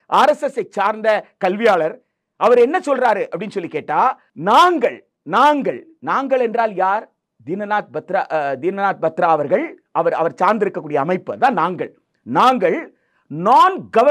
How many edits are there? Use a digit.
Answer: 1